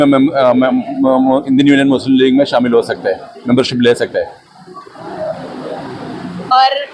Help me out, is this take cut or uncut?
cut